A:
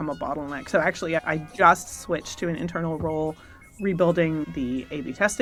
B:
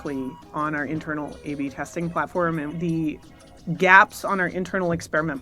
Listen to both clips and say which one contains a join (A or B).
B